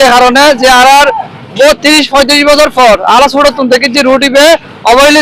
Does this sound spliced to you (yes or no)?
no